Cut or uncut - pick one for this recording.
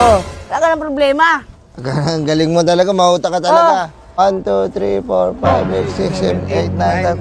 cut